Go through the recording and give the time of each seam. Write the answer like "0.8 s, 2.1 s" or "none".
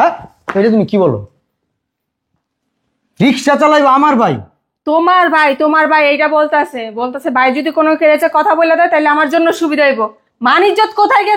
none